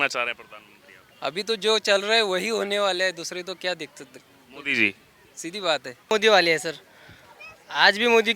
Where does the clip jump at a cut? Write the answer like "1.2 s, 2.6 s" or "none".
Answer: 6.1 s